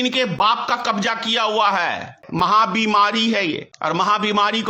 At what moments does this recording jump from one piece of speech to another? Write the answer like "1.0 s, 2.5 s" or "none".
2.2 s, 3.7 s

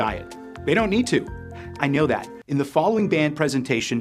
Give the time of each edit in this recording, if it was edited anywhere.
2.3 s

